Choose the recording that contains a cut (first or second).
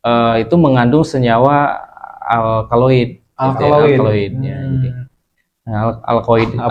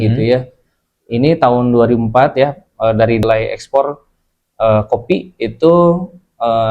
second